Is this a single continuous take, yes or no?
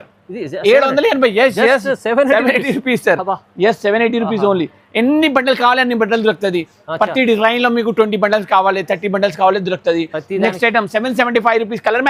yes